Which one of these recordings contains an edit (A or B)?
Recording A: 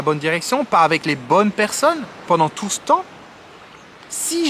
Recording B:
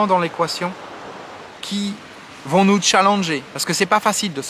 A